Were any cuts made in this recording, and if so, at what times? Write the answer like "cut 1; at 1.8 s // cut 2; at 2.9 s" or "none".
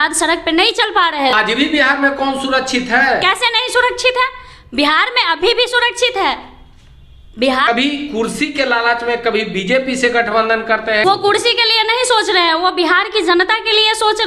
cut 1; at 1.4 s // cut 2; at 7.7 s // cut 3; at 11.0 s